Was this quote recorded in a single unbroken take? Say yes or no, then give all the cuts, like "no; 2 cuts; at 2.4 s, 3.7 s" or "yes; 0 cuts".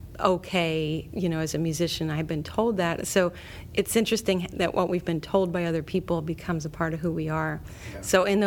no; 1 cut; at 1.1 s